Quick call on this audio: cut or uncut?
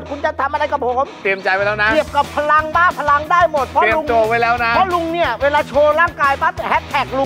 uncut